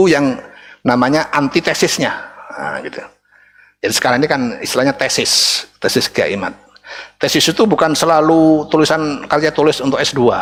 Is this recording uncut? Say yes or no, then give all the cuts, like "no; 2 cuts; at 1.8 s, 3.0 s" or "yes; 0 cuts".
yes; 0 cuts